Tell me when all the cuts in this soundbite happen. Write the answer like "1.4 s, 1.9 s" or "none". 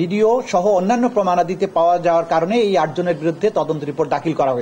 none